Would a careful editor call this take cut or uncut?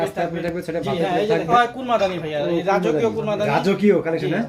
cut